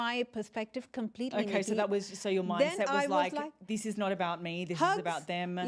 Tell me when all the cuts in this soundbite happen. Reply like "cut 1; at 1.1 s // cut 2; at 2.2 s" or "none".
none